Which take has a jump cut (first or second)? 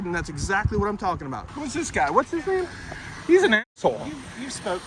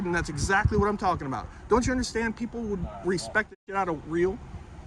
first